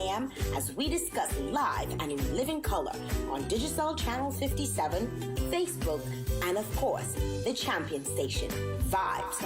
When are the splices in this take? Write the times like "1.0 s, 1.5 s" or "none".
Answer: 7.2 s, 8.5 s